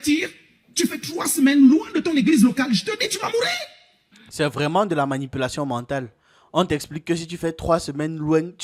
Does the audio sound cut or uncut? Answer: uncut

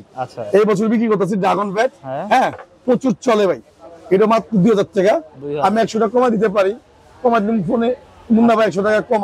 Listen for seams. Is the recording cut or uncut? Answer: uncut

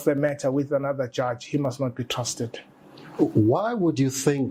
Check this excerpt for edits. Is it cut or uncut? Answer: uncut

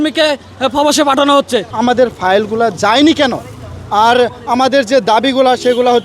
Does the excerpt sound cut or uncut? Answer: cut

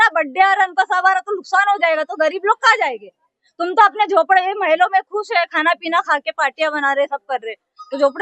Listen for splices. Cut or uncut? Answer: uncut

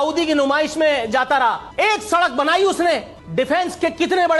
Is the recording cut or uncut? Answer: cut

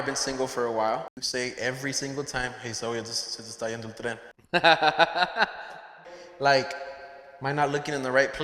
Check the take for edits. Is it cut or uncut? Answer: cut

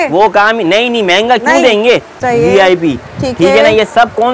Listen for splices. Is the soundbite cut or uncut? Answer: cut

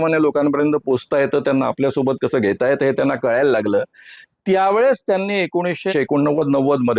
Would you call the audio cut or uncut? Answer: cut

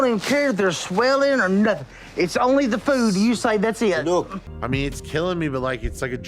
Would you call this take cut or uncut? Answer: cut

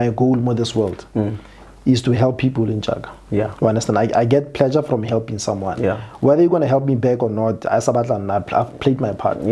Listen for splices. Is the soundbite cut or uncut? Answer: uncut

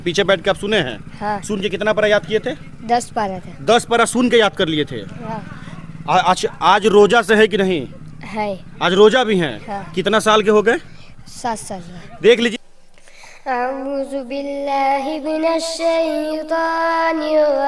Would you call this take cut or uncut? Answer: cut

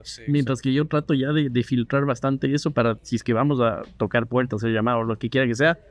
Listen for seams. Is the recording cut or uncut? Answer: uncut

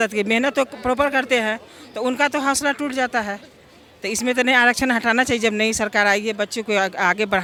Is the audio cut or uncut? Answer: uncut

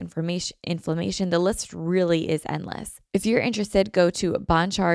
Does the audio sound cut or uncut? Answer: cut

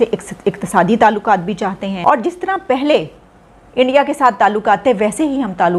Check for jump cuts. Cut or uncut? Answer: cut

